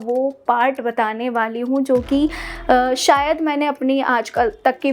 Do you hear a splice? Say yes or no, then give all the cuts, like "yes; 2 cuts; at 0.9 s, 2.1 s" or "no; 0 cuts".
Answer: no; 0 cuts